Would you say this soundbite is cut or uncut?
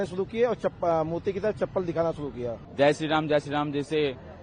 cut